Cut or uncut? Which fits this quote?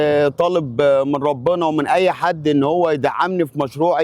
uncut